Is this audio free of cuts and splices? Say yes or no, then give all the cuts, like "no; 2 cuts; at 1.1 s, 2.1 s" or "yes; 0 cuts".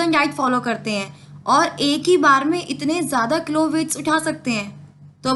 yes; 0 cuts